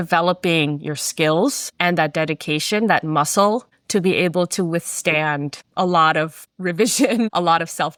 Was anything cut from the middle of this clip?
no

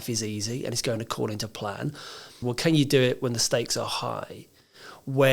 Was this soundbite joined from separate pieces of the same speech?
yes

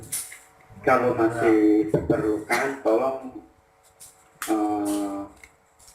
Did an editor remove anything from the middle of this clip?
no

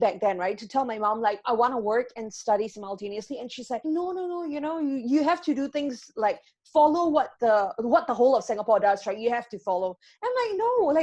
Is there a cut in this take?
yes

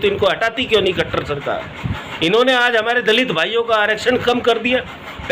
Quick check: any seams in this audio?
no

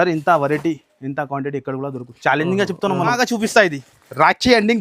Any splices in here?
yes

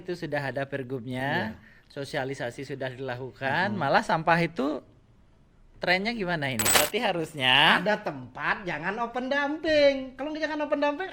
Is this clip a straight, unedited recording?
no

